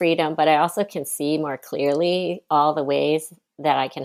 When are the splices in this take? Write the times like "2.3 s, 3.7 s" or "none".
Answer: none